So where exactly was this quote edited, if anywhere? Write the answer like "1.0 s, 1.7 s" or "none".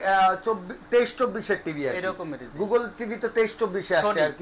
none